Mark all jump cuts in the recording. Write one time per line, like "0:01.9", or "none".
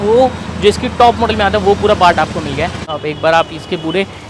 0:02.9